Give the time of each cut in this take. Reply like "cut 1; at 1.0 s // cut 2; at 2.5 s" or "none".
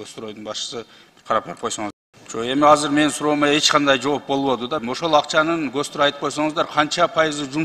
cut 1; at 2.1 s // cut 2; at 4.8 s